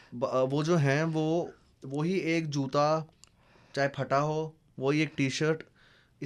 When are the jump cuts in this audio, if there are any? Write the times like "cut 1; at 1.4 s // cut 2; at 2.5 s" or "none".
none